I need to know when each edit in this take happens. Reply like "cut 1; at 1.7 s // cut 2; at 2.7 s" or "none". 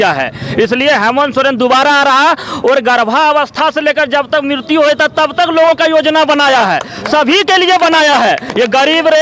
none